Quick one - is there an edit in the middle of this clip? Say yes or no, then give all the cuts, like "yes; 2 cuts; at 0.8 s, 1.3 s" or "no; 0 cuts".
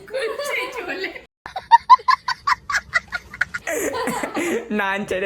yes; 2 cuts; at 1.3 s, 3.5 s